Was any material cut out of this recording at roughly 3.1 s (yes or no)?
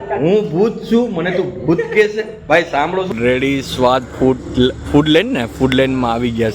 yes